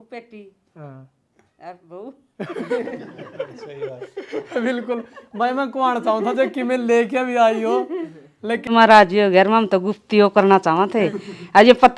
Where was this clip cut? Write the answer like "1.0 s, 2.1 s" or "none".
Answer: 8.7 s